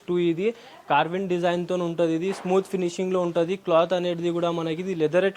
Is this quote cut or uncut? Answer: uncut